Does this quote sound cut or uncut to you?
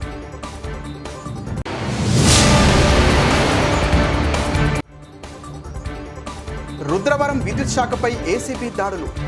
uncut